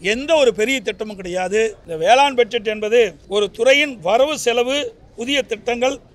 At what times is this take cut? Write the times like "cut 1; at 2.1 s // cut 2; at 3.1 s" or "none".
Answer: cut 1; at 1.8 s // cut 2; at 3.2 s